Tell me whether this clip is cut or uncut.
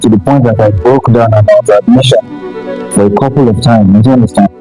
uncut